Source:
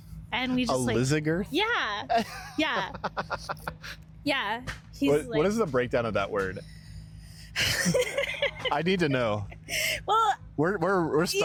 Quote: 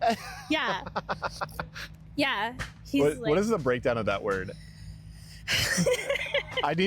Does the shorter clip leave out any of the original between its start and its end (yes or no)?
no